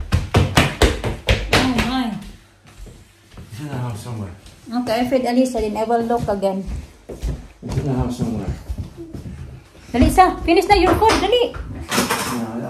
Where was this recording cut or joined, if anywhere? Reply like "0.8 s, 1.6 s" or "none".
none

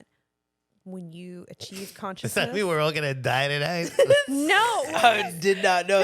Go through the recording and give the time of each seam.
4.9 s

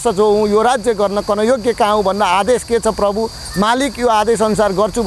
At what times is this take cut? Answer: none

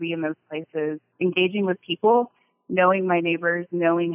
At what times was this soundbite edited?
1.1 s

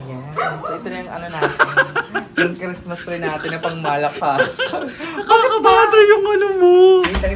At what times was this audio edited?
none

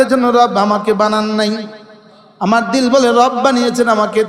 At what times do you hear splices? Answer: none

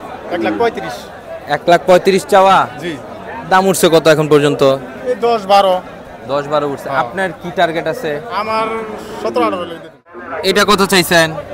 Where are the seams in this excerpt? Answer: 10.2 s

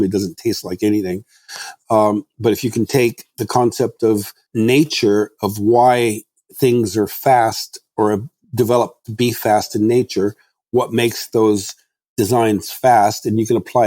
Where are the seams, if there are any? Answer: 4.4 s

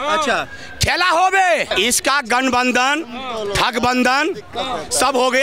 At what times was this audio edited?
1.7 s

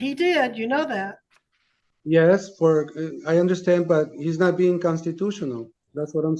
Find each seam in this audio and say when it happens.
none

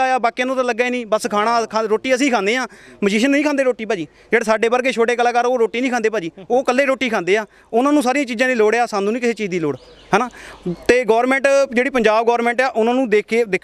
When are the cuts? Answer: none

